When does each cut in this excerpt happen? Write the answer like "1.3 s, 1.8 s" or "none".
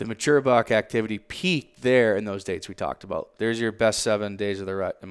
3.3 s